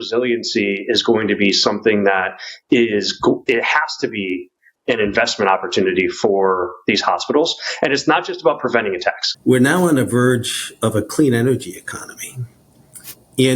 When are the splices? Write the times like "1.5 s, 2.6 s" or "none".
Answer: 9.3 s